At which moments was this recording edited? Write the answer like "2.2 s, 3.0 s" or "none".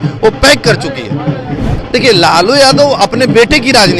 1.7 s